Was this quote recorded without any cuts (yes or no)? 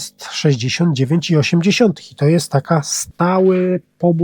no